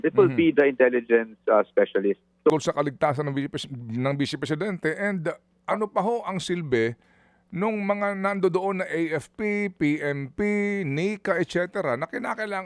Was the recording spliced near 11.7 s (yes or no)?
no